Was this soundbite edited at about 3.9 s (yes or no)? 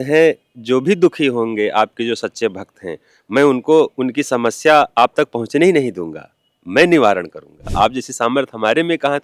no